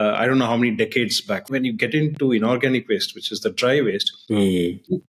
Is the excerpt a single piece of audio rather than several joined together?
no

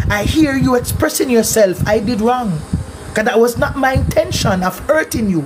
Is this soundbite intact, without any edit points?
yes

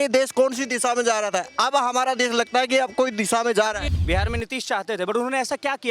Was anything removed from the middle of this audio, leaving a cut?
yes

